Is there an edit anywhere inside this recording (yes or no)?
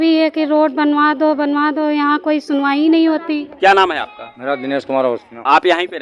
no